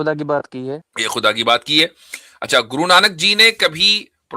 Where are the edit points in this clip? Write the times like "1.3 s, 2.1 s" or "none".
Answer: 0.9 s